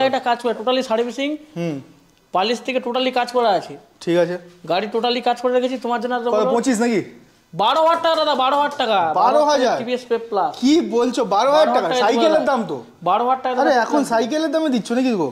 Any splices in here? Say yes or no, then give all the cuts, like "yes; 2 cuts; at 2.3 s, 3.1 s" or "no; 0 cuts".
no; 0 cuts